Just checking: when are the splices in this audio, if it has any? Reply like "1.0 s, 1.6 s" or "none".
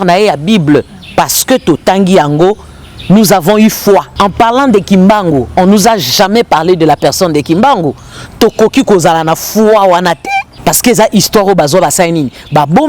4.1 s, 10.5 s

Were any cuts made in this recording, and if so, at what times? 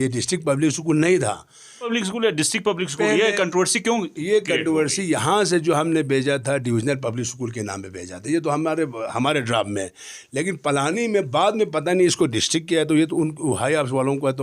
1.9 s

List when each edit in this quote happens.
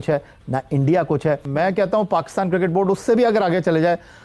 1.5 s

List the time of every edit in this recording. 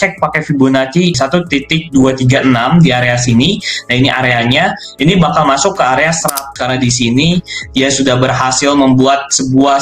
1.2 s, 6.6 s

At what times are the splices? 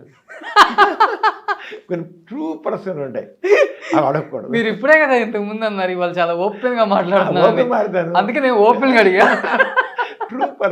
none

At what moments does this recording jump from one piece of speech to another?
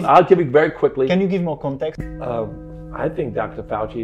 2.0 s

